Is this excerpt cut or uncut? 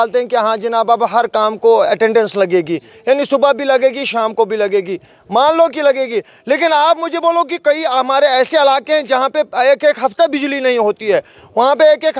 uncut